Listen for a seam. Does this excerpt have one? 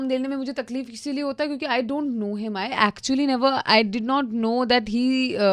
no; 0 cuts

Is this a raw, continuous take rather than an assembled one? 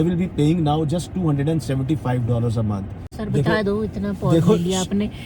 no; 1 cut; at 3.0 s

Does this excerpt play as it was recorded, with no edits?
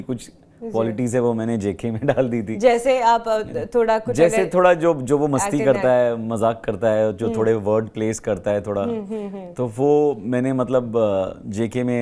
yes; 0 cuts

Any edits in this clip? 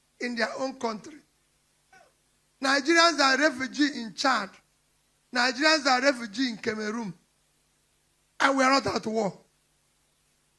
no; 0 cuts

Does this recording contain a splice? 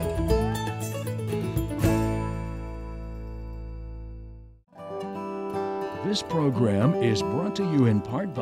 yes; 2 cuts; at 4.9 s, 6.0 s

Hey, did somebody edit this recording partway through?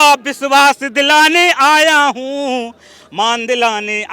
no; 0 cuts

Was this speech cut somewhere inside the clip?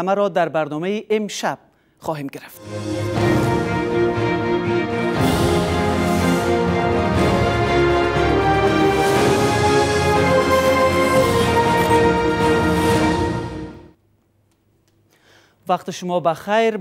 yes; 1 cut; at 2.8 s

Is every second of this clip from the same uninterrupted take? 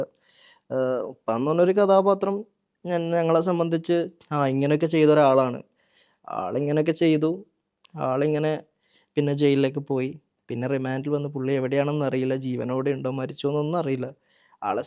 yes; 0 cuts

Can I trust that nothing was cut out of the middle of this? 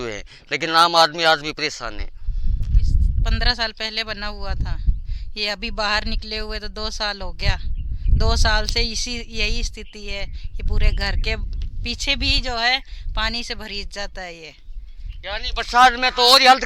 no; 1 cut; at 3.2 s

